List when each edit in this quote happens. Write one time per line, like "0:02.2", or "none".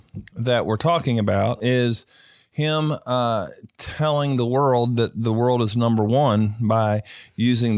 0:01.5